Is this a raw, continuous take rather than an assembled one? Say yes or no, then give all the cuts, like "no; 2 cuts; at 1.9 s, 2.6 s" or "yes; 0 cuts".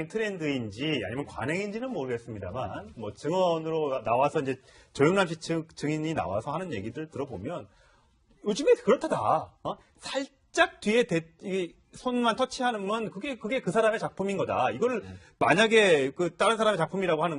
no; 1 cut; at 7.1 s